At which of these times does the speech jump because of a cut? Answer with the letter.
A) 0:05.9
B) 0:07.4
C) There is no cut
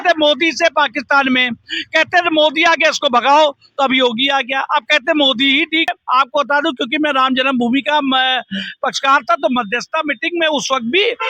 A